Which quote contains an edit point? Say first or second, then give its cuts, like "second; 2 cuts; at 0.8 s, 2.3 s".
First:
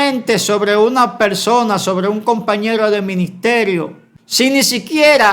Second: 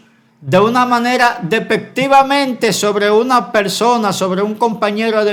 first; 1 cut; at 4.4 s